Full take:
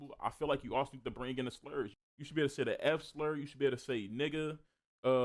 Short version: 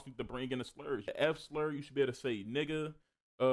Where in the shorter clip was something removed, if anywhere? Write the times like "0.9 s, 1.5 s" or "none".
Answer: 1.1 s